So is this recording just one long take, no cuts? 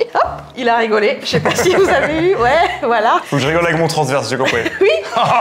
yes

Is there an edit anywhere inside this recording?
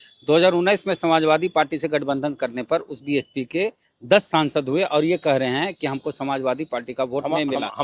no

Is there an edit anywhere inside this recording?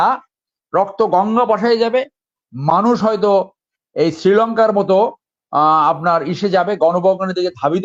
no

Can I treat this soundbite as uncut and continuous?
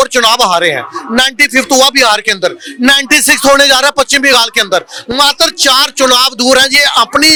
yes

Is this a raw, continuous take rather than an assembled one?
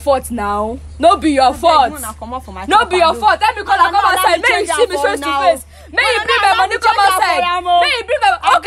yes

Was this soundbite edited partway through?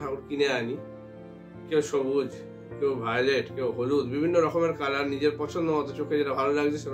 no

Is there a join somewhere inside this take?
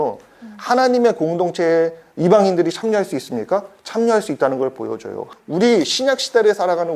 yes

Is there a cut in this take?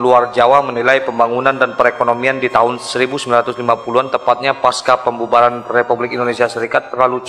no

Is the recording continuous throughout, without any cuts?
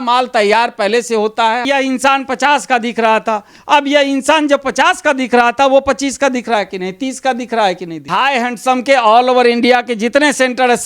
no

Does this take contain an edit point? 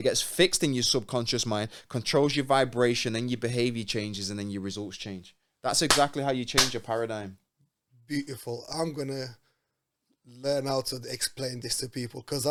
no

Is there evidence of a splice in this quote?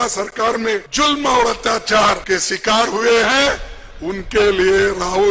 yes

